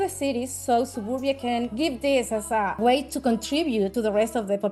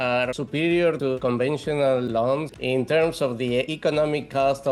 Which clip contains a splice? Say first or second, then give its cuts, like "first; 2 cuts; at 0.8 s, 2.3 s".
second; 3 cuts; at 1.2 s, 2.5 s, 3.7 s